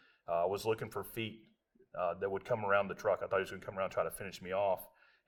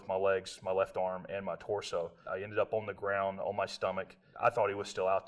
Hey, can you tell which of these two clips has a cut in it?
second; 2 cuts; at 2.2 s, 4.2 s

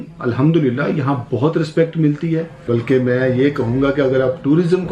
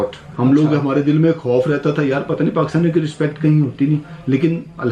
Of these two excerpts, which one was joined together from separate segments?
first; 1 cut; at 2.4 s

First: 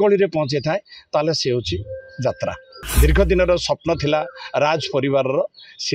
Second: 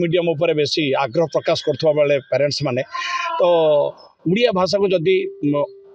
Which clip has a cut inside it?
first; 1 cut; at 2.8 s

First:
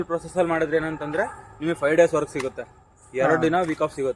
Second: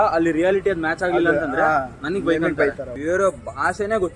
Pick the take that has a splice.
second; 1 cut; at 2.9 s

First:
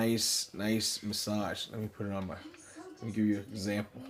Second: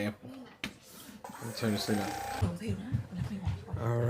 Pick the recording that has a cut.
second; 1 cut; at 2.4 s

